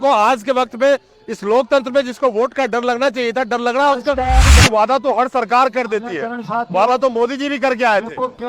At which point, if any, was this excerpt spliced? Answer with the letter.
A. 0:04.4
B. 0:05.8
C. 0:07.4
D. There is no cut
A